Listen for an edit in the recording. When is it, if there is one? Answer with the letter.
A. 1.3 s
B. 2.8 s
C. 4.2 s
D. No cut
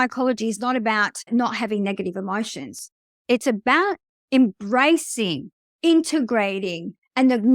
A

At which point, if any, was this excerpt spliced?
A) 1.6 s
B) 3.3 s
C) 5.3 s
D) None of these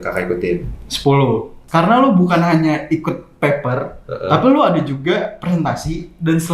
A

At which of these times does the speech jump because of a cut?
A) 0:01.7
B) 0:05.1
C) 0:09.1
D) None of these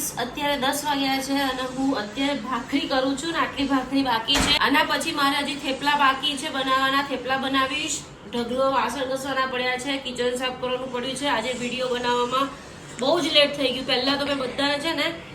D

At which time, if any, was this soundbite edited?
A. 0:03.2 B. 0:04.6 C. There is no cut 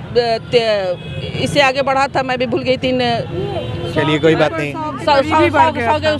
C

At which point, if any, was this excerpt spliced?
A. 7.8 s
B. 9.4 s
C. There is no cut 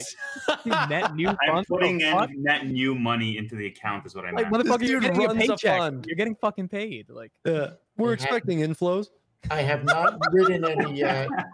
A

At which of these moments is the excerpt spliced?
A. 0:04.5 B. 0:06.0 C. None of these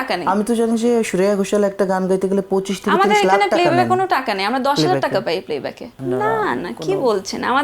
B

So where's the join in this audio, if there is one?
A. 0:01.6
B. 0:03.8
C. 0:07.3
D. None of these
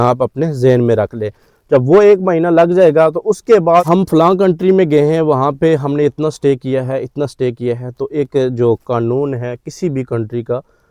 B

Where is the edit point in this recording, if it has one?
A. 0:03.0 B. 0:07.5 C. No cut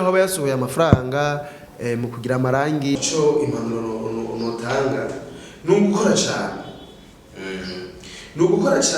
A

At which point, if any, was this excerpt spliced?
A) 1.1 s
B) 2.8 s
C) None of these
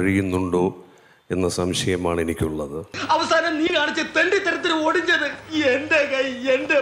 B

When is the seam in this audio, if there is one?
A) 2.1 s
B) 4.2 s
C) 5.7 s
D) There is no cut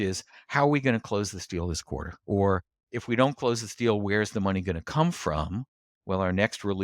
A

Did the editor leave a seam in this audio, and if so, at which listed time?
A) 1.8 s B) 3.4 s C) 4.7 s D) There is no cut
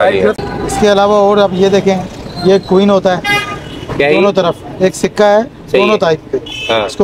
D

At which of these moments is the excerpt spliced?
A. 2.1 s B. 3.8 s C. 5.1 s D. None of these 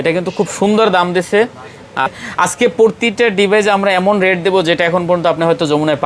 A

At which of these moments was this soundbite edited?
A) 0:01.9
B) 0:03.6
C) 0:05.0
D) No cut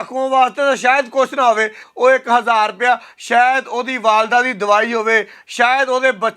A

